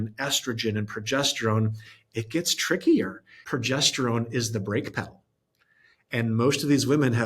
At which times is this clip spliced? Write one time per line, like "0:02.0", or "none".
0:03.3

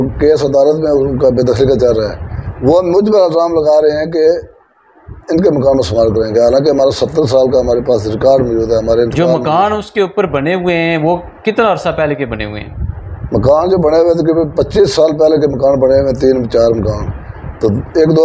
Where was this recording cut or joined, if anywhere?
none

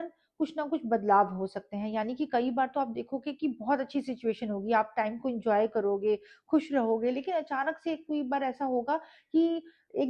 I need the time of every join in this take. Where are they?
none

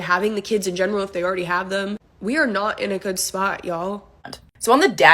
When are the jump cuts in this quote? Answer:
0:04.2

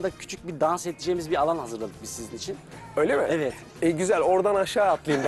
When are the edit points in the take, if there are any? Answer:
none

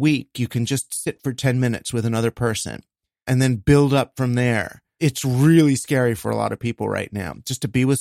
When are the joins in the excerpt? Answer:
0:03.3
0:04.9

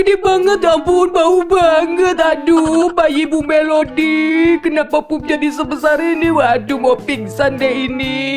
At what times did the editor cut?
none

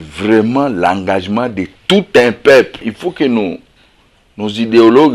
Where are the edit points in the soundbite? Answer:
0:02.8

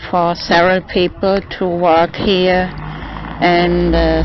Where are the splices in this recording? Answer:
0:02.9

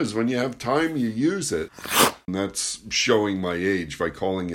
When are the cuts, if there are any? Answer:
0:01.9

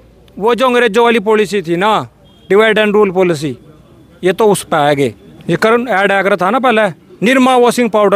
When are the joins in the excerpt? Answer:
0:05.3

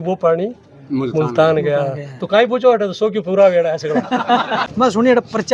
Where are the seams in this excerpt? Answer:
0:04.6

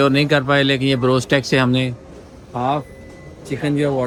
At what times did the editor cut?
none

